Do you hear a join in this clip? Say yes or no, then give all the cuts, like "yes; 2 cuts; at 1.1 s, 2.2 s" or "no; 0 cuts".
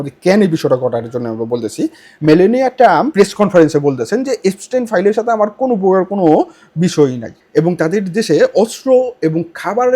yes; 2 cuts; at 2.1 s, 7.3 s